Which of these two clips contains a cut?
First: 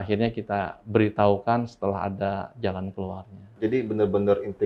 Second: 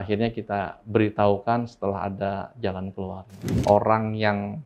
second; 1 cut; at 3.5 s

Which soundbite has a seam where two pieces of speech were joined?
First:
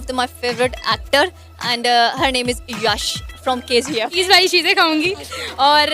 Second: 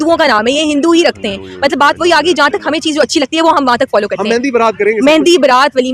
first; 1 cut; at 4.1 s

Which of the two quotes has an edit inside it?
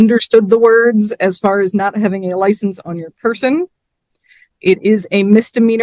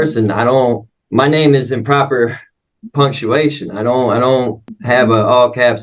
second; 2 cuts; at 0.9 s, 4.7 s

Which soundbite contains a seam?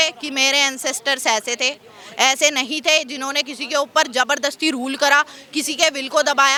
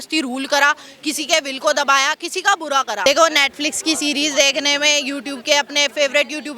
second; 1 cut; at 3.1 s

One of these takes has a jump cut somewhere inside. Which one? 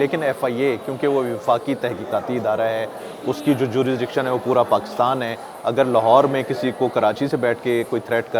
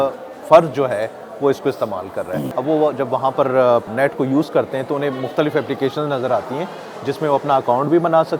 second; 2 cuts; at 2.5 s, 3.9 s

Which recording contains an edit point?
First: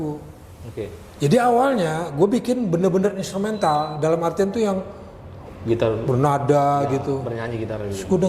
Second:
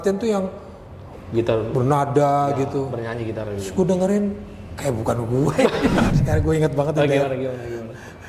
second; 1 cut; at 6.1 s

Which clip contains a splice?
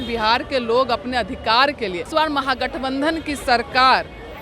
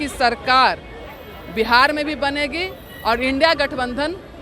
first; 1 cut; at 2.1 s

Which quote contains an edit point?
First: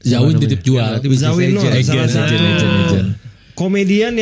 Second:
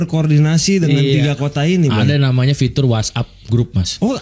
first; 1 cut; at 0.9 s

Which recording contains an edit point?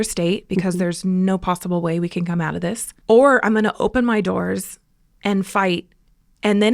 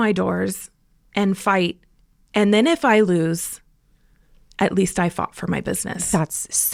first; 1 cut; at 2.9 s

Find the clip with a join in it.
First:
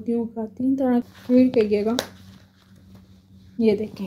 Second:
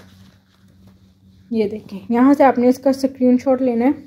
first; 1 cut; at 1.1 s

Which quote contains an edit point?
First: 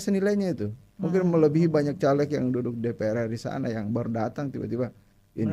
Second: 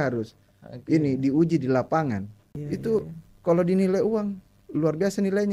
second; 1 cut; at 2.6 s

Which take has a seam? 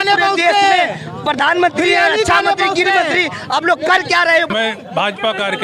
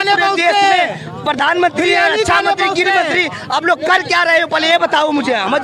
first; 1 cut; at 4.5 s

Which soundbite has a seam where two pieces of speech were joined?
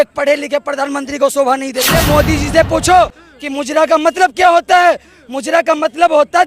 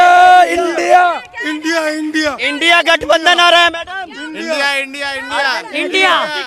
first; 1 cut; at 1.9 s

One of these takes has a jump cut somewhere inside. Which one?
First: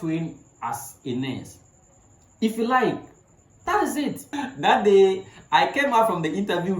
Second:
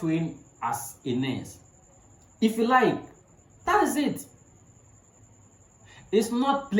first; 1 cut; at 4.4 s

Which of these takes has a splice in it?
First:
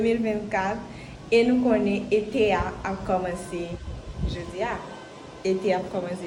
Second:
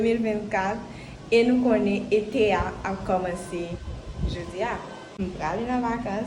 second; 1 cut; at 5.1 s

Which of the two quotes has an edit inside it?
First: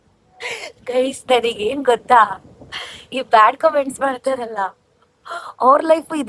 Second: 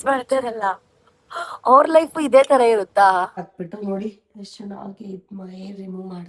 second; 1 cut; at 3.4 s

